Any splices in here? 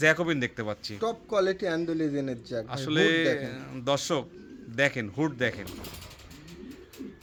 no; 0 cuts

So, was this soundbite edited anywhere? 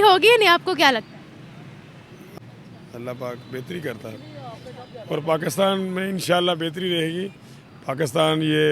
yes; 1 cut; at 2.2 s

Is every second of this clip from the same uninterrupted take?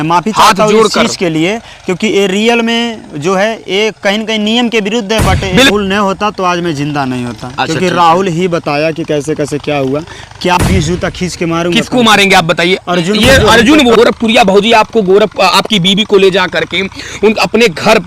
no; 3 cuts; at 5.7 s, 10.6 s, 13.9 s

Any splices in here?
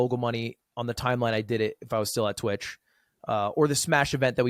no; 0 cuts

